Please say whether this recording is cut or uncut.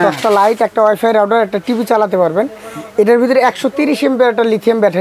uncut